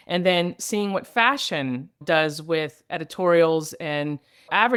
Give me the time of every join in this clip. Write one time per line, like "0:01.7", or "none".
none